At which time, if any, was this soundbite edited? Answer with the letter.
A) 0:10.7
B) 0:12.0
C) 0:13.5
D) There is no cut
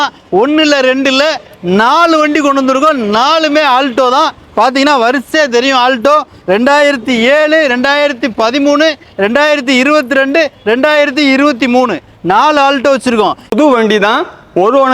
C